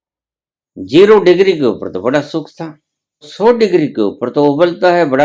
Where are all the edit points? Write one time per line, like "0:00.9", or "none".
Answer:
0:03.3